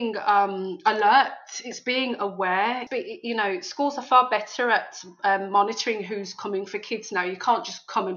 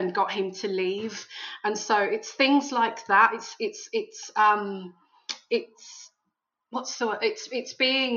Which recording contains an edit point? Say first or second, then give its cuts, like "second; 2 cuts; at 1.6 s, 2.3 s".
first; 1 cut; at 2.8 s